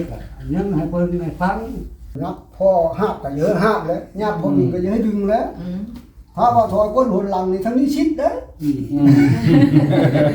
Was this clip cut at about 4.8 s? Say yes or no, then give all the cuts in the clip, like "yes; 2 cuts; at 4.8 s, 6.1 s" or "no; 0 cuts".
no; 1 cut; at 2.1 s